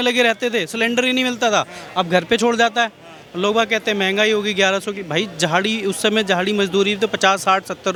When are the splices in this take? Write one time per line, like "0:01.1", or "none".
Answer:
none